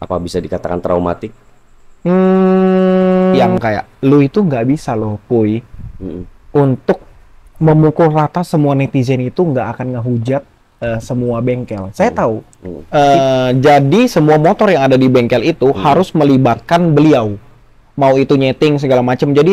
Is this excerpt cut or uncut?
cut